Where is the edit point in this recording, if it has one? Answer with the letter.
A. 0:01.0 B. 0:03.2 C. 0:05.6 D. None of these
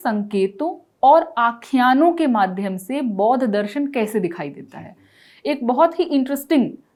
D